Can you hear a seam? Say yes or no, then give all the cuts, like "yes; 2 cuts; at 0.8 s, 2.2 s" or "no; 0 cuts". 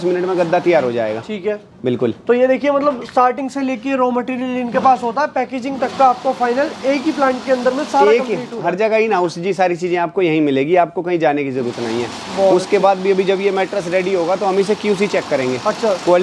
no; 0 cuts